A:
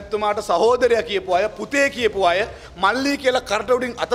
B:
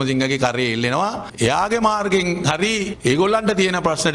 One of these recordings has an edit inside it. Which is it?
B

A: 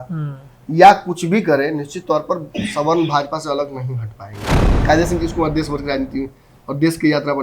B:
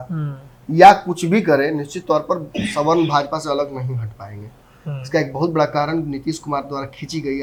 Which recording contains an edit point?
A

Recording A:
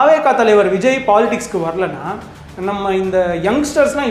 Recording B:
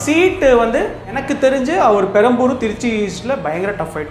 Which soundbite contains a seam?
B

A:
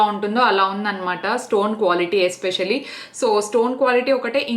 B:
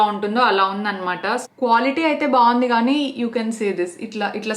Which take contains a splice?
B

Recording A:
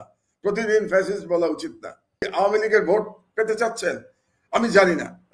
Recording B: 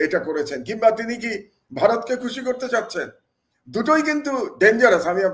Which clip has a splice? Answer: A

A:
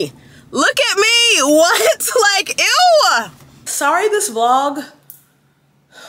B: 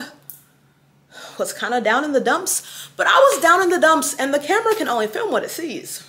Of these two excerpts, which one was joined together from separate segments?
A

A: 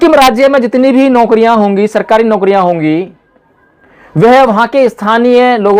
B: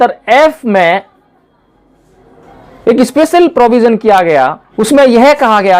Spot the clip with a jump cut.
B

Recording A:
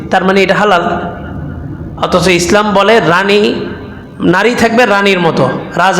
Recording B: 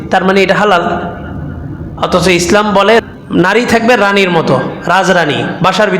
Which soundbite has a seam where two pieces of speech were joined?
B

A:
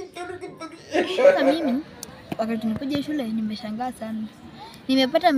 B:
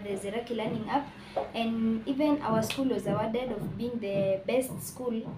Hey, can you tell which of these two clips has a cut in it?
A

